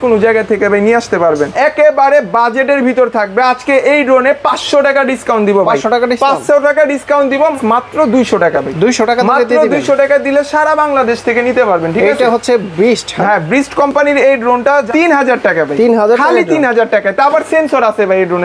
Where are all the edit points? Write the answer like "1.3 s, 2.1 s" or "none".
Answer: 1.5 s, 7.6 s, 14.8 s